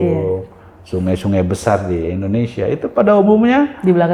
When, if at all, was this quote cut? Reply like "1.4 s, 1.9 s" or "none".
none